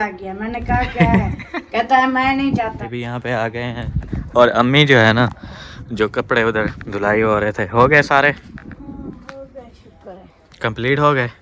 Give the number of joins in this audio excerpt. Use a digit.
1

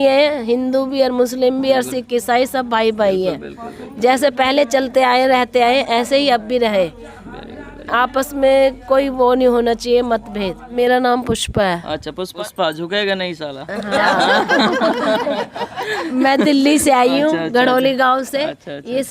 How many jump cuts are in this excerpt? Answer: 2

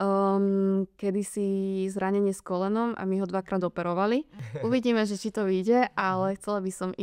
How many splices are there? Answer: 1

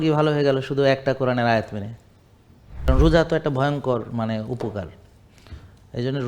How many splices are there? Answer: 1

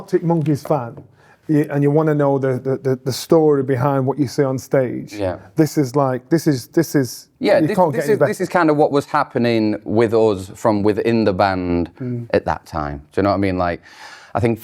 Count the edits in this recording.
0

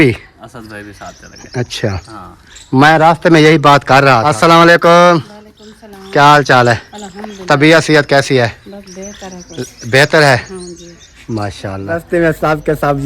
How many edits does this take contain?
2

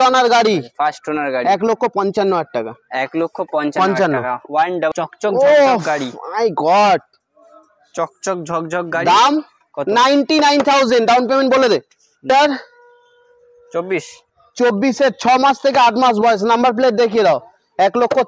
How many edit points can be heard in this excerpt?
2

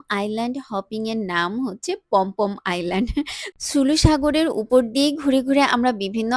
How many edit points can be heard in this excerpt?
0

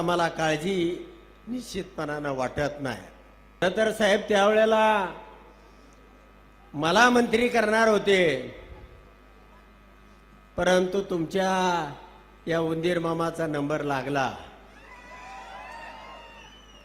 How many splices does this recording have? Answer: 1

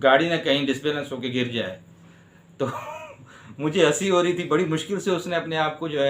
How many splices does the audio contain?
1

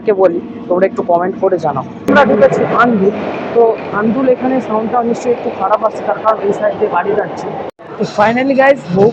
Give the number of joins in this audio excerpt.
2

